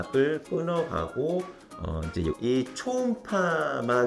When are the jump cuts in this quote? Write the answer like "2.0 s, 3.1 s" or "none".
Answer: 2.4 s